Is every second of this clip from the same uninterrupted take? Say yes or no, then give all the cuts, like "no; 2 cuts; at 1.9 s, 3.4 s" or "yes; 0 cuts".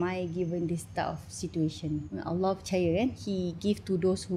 no; 2 cuts; at 2.1 s, 3.2 s